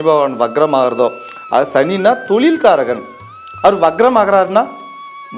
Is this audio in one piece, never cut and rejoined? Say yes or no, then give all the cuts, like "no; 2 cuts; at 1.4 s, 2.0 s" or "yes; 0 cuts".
yes; 0 cuts